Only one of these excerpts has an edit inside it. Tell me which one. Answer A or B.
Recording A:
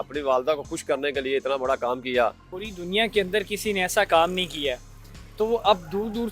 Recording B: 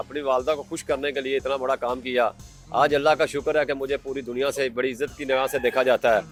A